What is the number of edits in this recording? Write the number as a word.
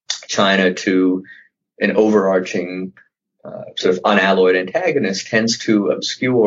zero